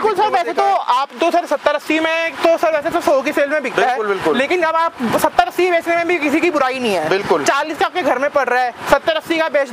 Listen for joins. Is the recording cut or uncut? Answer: uncut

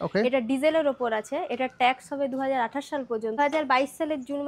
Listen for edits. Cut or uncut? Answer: cut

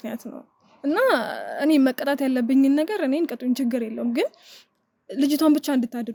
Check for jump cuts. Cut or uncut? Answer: uncut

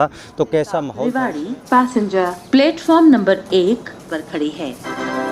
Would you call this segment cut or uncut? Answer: cut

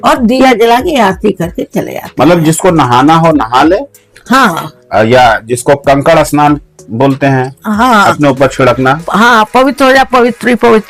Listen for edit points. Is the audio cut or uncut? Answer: uncut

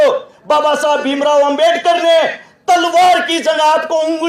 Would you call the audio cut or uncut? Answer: uncut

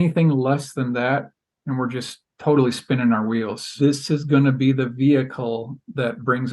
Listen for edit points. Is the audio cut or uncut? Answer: cut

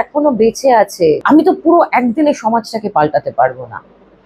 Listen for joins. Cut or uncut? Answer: cut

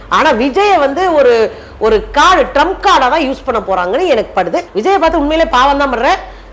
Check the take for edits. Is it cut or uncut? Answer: cut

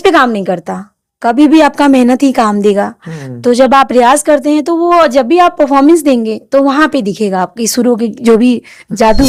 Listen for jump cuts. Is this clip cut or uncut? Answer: uncut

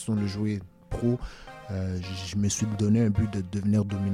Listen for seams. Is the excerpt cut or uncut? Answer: uncut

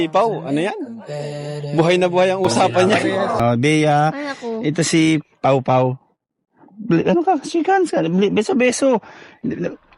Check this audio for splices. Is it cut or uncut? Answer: cut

